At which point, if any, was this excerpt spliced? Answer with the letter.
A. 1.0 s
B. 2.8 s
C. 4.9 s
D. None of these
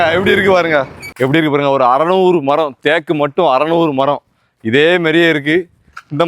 A